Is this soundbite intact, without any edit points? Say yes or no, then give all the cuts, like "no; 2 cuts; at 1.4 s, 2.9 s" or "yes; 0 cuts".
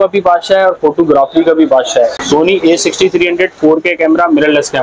no; 1 cut; at 2.1 s